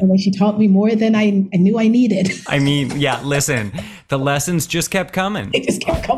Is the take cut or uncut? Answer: uncut